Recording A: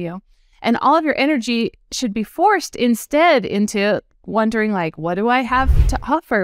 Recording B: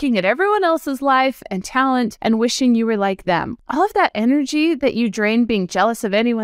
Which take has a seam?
B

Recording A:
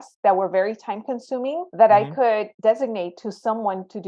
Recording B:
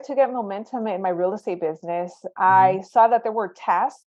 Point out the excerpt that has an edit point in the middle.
A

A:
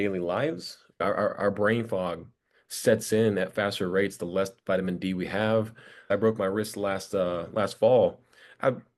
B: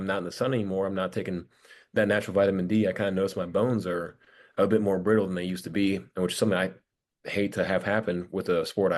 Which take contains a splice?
A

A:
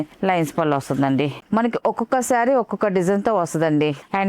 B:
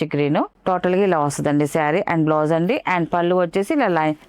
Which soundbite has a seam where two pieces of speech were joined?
A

